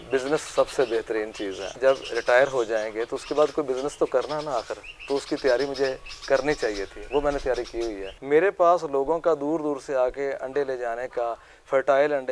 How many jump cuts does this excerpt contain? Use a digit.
2